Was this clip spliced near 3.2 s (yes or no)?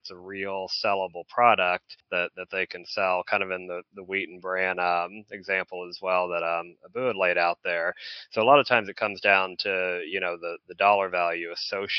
no